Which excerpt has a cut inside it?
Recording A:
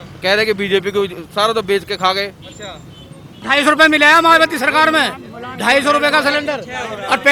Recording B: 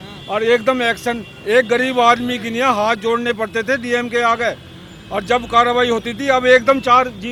A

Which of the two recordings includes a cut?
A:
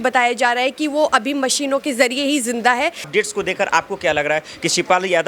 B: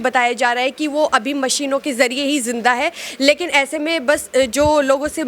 A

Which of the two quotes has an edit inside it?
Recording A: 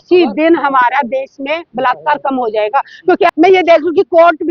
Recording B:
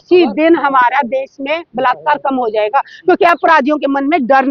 A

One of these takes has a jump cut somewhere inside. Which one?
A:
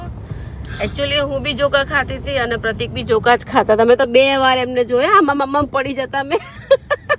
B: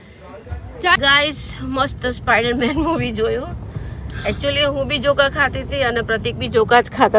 B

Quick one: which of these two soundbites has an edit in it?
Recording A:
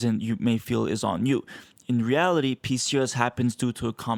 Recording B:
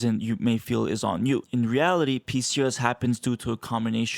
B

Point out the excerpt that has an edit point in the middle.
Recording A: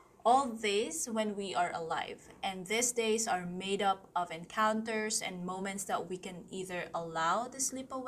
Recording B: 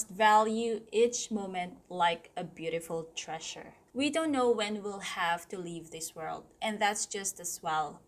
B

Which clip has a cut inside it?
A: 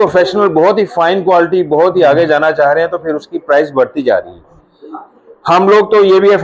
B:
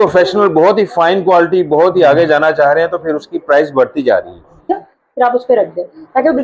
B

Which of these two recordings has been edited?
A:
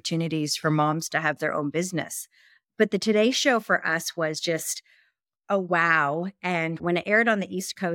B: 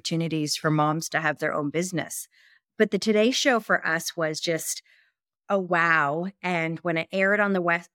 A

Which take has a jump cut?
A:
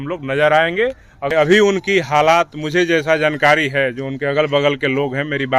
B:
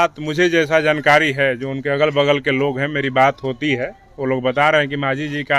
A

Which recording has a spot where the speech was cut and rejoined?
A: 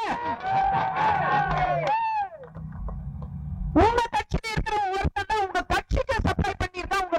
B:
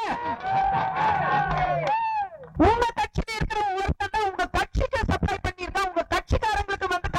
B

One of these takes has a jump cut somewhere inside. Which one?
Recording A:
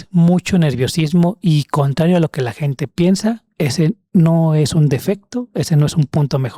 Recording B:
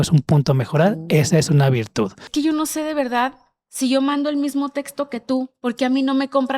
B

